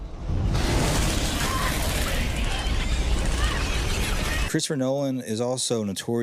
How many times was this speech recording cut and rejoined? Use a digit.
1